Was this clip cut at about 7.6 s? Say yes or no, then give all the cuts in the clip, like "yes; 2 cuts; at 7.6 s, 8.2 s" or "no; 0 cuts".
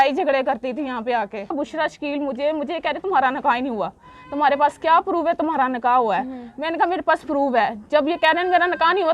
no; 1 cut; at 1.5 s